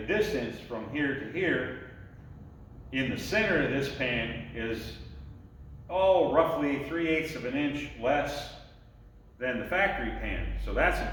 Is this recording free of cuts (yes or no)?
yes